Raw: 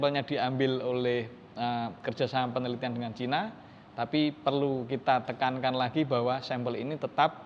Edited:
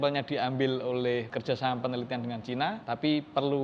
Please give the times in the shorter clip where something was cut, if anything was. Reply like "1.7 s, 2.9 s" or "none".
1.3 s, 2.8 s